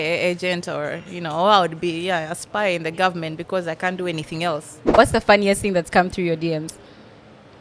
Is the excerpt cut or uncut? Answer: cut